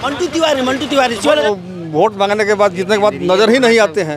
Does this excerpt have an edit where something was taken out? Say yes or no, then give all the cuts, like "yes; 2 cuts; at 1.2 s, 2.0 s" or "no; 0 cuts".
yes; 1 cut; at 1.5 s